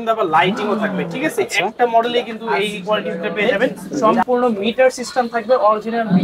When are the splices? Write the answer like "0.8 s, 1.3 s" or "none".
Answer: 4.0 s